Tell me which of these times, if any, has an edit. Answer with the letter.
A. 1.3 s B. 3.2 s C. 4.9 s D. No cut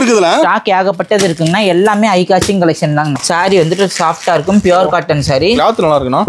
B